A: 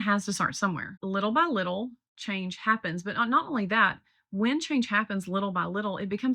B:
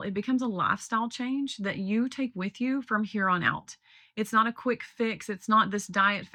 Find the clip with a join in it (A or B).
A